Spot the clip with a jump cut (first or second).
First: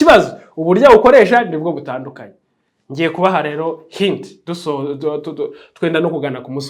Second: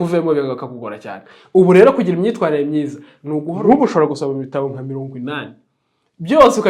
second